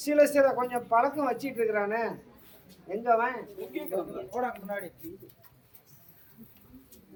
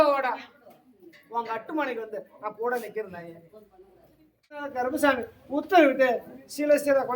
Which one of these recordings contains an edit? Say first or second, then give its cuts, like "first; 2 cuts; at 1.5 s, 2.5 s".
second; 1 cut; at 4.7 s